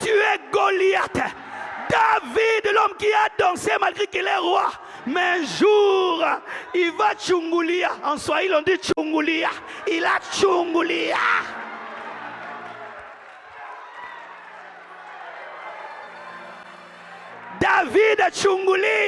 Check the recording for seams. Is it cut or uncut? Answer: uncut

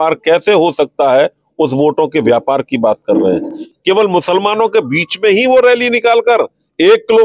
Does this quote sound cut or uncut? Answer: cut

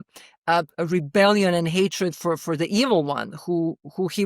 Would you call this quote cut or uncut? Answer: cut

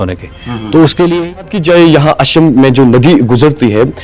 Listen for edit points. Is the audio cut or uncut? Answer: cut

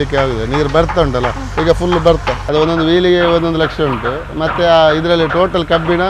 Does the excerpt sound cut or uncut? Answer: cut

